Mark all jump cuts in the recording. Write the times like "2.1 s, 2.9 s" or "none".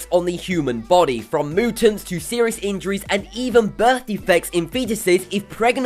3.8 s